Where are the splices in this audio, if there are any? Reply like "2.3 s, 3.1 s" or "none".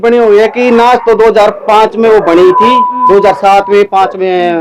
none